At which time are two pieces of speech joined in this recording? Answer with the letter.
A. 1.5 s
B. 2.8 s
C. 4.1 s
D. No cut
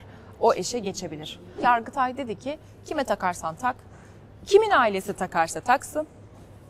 A